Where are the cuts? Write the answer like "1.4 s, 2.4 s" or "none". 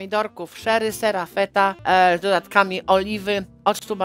1.8 s